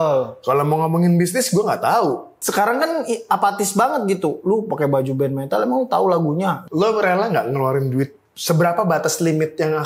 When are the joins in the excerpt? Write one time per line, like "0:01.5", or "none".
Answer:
0:02.3
0:06.6